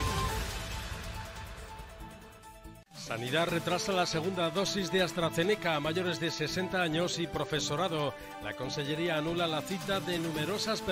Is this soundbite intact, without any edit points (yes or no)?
no